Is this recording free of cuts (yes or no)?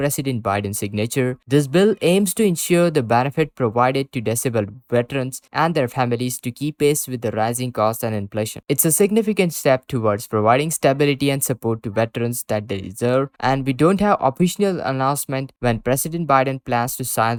yes